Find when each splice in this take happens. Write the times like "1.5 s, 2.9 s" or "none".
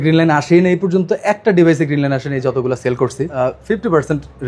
3.3 s